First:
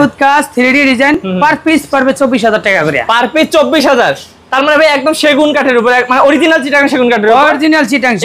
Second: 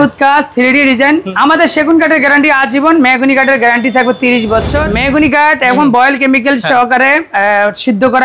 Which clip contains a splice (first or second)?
second